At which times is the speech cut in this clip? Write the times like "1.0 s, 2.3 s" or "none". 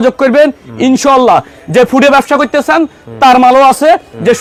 none

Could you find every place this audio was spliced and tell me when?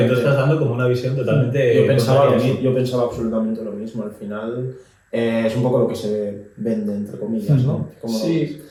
none

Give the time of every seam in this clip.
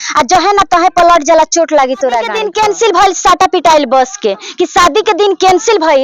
2.4 s

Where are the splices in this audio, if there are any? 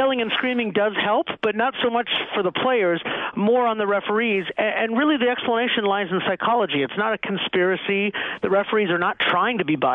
none

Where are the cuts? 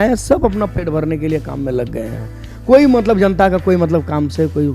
none

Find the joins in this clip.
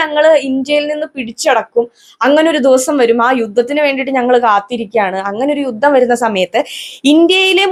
none

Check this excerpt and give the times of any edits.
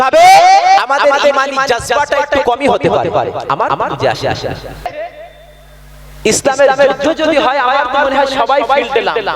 4.9 s

